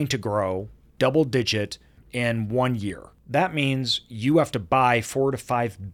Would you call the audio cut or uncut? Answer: cut